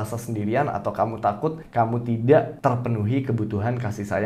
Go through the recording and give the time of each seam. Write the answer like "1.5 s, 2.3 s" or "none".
1.6 s, 2.5 s